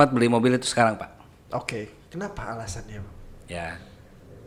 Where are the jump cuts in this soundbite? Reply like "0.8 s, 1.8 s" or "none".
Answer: none